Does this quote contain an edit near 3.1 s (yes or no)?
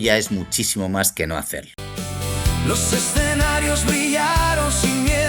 no